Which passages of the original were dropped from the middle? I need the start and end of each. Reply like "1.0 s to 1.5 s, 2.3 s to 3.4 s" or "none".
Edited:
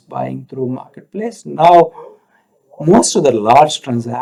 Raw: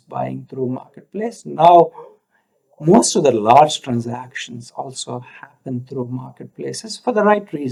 none